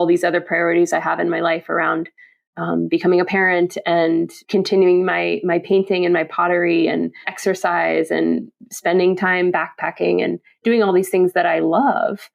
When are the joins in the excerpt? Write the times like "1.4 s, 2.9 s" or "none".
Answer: 4.4 s, 7.3 s